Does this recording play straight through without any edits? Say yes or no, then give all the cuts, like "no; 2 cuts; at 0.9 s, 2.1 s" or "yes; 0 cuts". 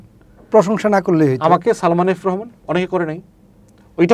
yes; 0 cuts